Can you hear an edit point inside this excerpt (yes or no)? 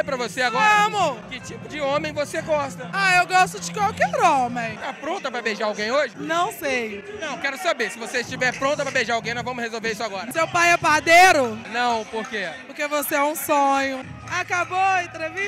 yes